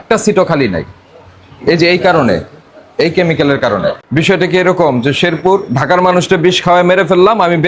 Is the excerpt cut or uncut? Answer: cut